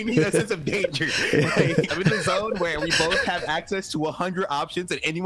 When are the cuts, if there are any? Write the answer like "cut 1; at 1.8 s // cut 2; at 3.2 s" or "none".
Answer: cut 1; at 1.9 s

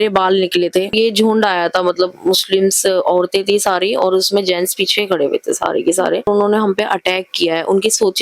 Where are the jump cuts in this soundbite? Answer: cut 1; at 0.9 s // cut 2; at 6.3 s

